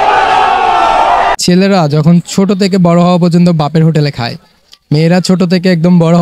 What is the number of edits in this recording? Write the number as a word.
one